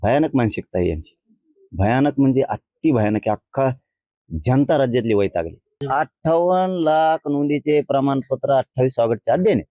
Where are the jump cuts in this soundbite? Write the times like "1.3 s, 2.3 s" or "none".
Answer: 5.8 s